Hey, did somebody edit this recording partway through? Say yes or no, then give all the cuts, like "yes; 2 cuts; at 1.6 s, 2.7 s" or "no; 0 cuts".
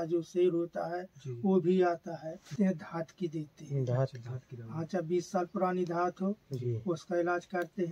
yes; 1 cut; at 2.5 s